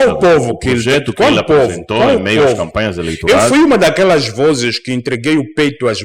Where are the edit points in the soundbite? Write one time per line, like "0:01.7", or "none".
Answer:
none